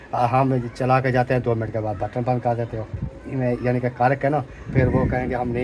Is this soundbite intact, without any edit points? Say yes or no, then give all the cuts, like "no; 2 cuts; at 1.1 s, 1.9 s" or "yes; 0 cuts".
yes; 0 cuts